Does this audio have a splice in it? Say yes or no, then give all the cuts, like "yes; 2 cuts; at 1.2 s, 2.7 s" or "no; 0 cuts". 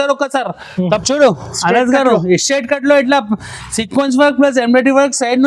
yes; 1 cut; at 1.0 s